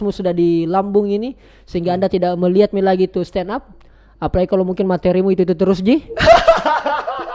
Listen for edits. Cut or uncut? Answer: uncut